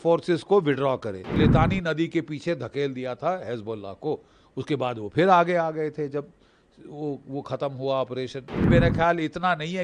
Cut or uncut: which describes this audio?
cut